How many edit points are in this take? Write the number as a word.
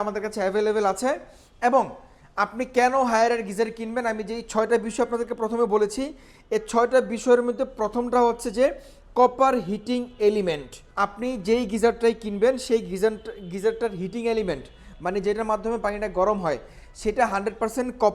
zero